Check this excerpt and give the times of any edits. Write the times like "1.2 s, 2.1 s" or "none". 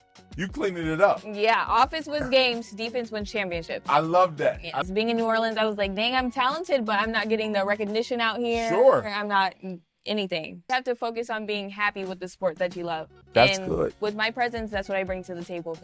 4.9 s, 10.6 s

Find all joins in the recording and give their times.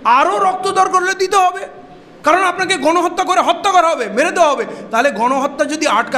none

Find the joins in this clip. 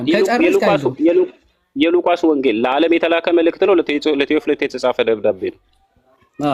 none

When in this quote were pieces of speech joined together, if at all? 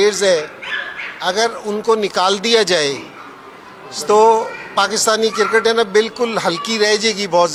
none

